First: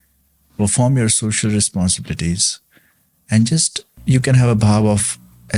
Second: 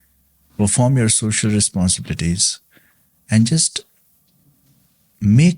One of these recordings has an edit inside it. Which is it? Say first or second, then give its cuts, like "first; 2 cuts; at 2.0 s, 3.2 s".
first; 1 cut; at 3.9 s